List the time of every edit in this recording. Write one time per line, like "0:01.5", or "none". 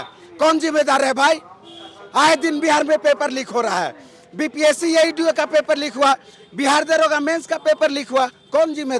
none